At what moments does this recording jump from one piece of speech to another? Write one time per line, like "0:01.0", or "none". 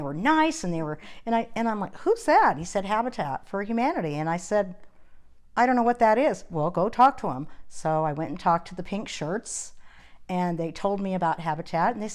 none